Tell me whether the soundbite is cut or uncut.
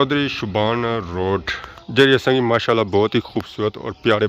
uncut